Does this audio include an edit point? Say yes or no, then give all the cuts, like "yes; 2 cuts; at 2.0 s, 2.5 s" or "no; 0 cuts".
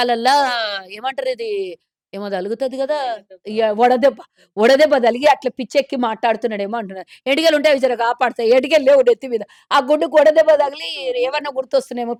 no; 0 cuts